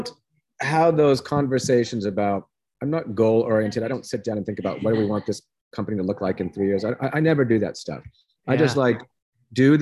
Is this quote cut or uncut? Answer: uncut